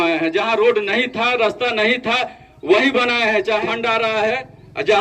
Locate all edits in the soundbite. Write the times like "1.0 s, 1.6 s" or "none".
3.6 s